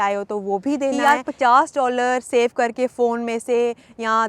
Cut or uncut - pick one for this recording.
cut